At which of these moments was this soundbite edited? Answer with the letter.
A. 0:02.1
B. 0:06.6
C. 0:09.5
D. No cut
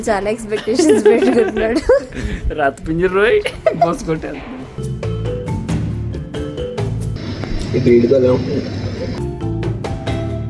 D